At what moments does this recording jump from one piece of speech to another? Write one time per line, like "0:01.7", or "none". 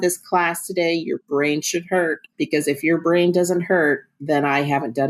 0:02.2